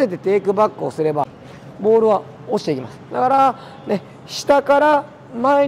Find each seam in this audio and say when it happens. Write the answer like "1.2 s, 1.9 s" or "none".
1.3 s

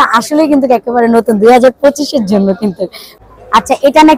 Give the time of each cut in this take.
3.0 s

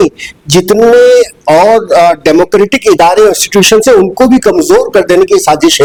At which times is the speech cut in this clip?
none

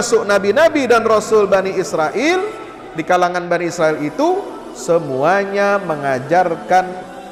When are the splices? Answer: none

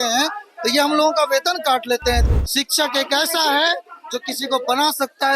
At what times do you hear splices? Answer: 2.3 s

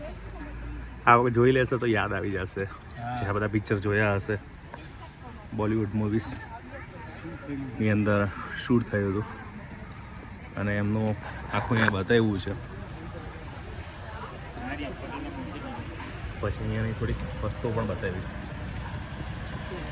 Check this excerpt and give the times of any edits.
none

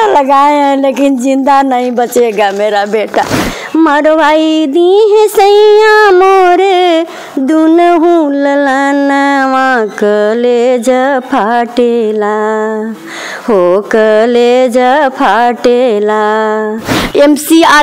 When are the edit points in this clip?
3.4 s, 17.0 s

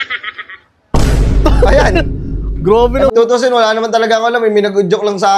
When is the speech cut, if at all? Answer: 3.1 s

